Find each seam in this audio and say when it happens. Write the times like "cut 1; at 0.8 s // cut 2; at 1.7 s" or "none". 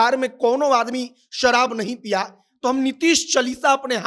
none